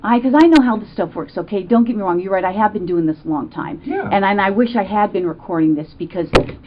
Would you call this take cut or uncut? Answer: uncut